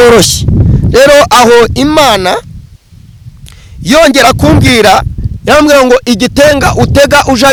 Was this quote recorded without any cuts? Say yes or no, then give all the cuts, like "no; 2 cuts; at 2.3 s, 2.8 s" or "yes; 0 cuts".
yes; 0 cuts